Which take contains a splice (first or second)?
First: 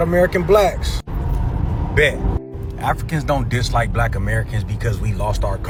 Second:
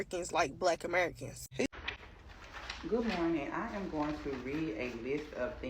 second